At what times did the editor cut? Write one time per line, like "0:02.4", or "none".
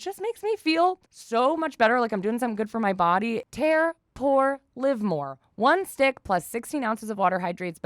0:01.1
0:03.5

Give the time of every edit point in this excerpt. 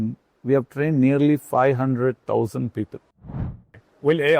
0:03.4

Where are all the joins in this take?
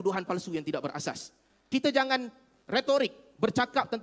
0:01.5

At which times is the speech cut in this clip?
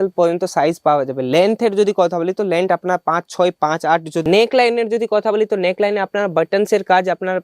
0:04.2

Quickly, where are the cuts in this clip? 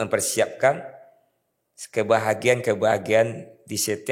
none

